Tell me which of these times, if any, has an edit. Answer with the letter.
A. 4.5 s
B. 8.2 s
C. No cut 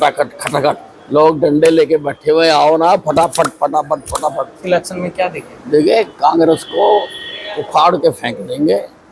A